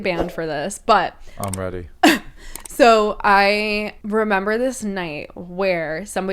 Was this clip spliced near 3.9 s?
yes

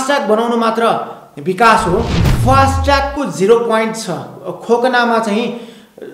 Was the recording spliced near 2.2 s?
yes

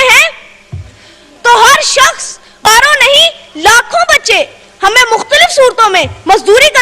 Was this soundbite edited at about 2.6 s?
yes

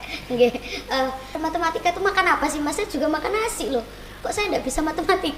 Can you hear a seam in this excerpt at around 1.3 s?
yes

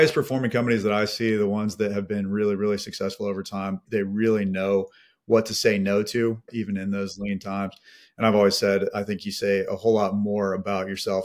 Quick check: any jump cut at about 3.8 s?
yes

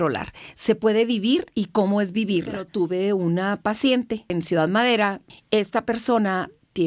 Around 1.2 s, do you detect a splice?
no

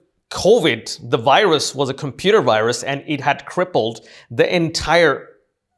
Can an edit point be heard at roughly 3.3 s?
no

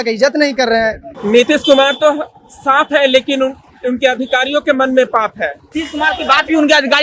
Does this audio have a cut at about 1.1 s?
yes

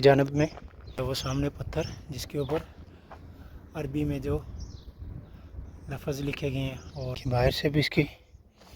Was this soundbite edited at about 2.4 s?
no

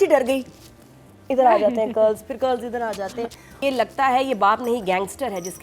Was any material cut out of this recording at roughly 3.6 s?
yes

